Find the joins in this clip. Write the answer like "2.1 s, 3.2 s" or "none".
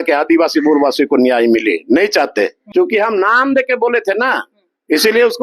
2.6 s